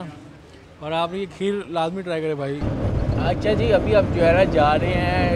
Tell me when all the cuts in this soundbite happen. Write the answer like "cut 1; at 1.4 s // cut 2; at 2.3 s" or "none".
cut 1; at 2.6 s